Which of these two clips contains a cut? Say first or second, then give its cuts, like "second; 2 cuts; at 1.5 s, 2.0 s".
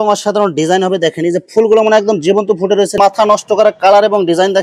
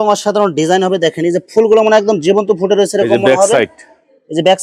first; 1 cut; at 3.0 s